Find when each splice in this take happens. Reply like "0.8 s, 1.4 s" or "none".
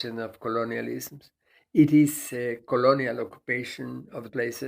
none